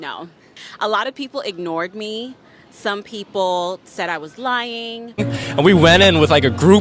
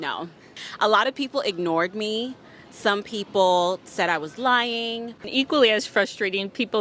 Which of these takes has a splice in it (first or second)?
first